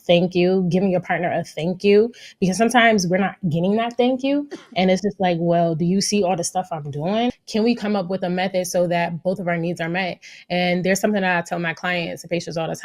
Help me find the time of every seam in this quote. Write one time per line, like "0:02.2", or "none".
0:07.4